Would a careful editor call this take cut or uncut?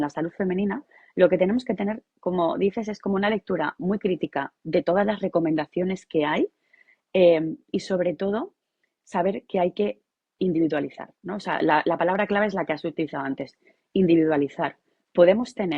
uncut